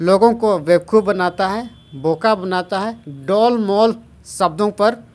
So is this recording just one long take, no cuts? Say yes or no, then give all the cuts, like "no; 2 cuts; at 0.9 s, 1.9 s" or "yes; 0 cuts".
yes; 0 cuts